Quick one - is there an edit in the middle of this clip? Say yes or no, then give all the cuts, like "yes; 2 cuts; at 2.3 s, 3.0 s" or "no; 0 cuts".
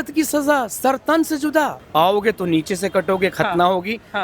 yes; 1 cut; at 1.8 s